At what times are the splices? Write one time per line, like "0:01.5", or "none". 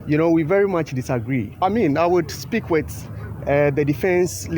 0:01.5